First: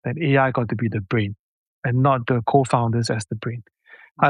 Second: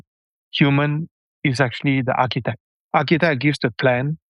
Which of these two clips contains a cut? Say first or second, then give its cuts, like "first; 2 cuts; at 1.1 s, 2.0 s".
second; 1 cut; at 2.7 s